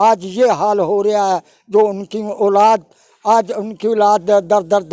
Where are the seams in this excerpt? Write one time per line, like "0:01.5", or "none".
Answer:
none